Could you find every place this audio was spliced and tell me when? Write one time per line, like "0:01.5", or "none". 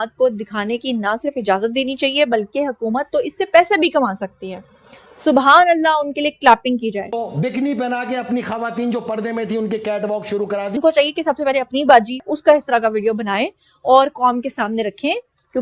0:07.2
0:10.8